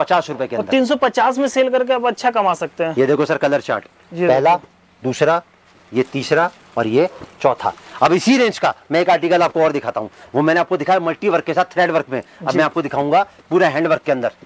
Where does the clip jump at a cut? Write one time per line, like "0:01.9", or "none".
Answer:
none